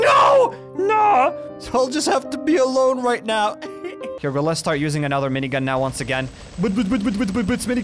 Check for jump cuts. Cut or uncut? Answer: cut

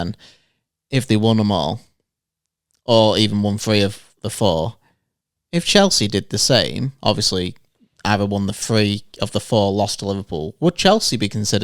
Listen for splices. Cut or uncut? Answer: uncut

